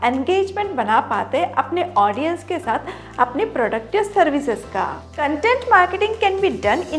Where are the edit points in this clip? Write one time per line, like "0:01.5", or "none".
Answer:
0:05.1